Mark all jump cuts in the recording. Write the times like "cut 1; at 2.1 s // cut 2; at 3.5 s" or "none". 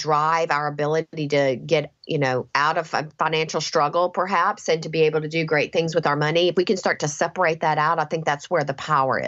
none